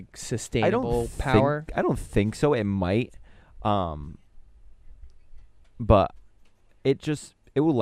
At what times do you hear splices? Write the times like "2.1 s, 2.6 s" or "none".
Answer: none